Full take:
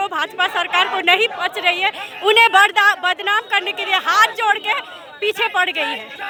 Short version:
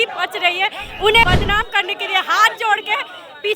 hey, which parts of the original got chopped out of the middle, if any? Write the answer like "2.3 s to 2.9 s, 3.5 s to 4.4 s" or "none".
2.5 s to 3.0 s